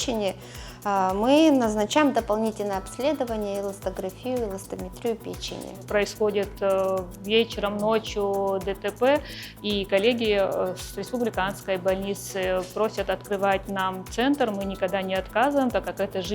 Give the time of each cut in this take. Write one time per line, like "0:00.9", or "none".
0:05.8